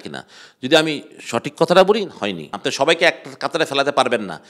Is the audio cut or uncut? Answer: cut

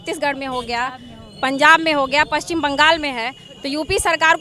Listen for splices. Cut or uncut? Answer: uncut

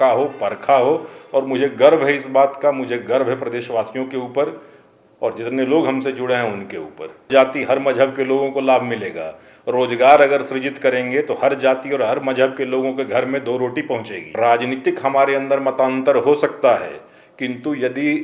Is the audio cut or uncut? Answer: cut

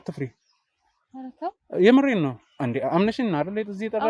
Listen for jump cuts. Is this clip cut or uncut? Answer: uncut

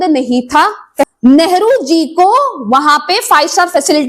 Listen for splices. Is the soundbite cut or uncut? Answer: cut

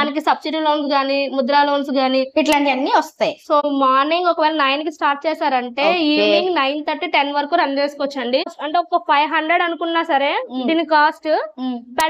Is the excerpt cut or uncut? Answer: cut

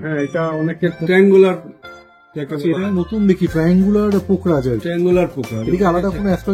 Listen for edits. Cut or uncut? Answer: cut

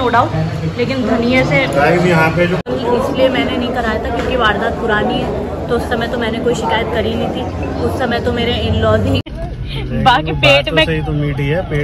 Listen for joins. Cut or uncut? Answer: cut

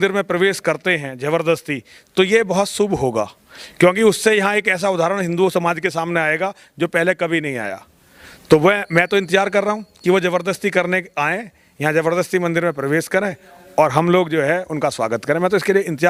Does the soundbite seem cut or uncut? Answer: uncut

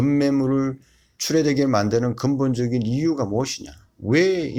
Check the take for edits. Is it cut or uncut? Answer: uncut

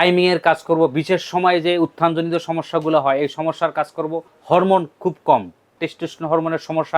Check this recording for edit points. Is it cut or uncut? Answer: cut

